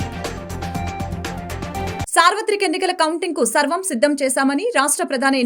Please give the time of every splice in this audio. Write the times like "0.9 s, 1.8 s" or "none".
2.1 s